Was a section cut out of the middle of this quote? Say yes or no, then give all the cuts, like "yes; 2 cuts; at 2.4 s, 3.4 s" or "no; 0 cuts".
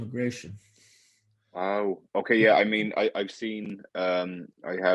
no; 0 cuts